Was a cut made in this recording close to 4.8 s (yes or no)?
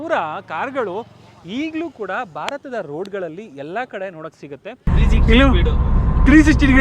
yes